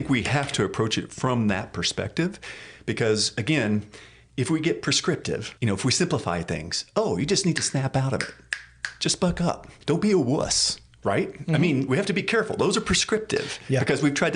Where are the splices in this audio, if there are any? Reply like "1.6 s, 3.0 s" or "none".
5.5 s, 9.7 s